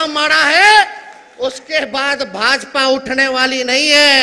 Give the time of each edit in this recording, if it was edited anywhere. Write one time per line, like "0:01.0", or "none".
none